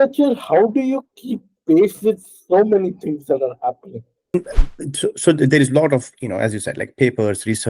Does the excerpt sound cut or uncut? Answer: cut